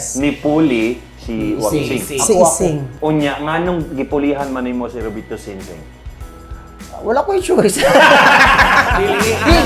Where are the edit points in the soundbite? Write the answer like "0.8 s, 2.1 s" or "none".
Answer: 2.9 s